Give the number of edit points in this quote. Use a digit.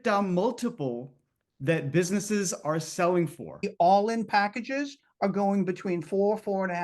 1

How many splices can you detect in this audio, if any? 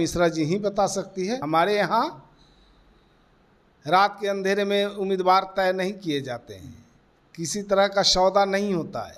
1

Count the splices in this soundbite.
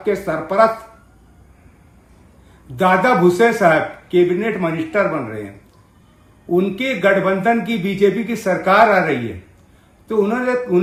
0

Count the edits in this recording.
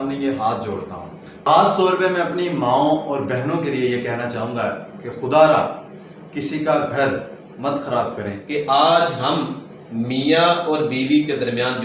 1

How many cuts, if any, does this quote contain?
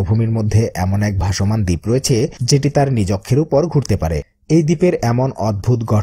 1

